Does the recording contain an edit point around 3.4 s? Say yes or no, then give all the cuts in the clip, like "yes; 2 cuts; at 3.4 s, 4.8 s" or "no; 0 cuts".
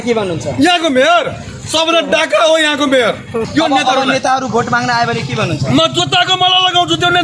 yes; 1 cut; at 3.4 s